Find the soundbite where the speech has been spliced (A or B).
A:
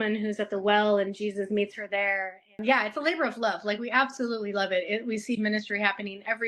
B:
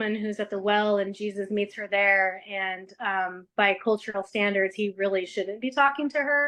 A